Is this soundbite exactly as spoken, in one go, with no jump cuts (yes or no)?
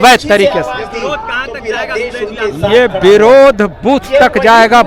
yes